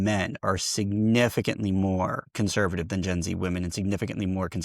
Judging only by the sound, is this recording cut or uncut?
cut